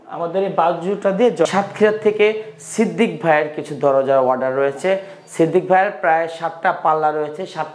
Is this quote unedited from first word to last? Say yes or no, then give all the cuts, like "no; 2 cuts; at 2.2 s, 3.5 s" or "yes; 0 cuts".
no; 1 cut; at 1.5 s